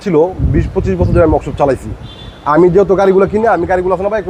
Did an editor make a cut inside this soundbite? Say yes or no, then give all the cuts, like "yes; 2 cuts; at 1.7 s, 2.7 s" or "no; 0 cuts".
no; 0 cuts